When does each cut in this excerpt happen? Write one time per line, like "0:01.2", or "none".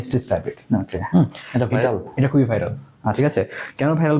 none